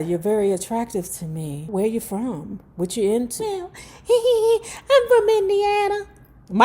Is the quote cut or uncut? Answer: cut